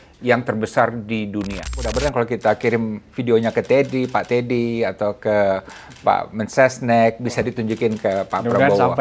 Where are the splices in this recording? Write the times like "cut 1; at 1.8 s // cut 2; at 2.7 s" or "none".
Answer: cut 1; at 1.9 s